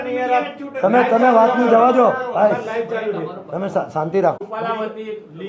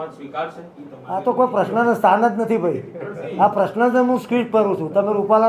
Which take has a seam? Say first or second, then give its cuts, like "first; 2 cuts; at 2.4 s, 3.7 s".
first; 1 cut; at 4.4 s